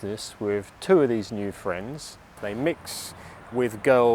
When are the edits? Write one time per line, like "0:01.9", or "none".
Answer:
0:02.2